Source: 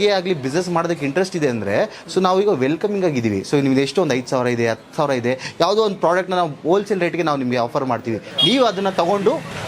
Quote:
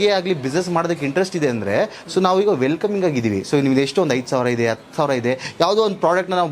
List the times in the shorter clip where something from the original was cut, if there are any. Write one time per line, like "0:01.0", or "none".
none